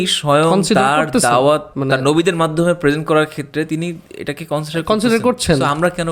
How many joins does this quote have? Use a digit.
1